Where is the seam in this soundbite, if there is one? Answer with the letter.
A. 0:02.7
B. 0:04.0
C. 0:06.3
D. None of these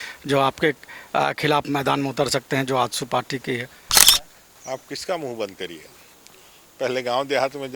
B